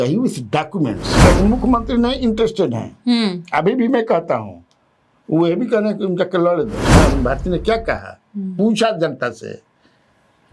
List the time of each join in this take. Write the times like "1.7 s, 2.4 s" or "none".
1.2 s, 6.9 s